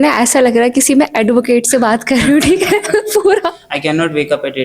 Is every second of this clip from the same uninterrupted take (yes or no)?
no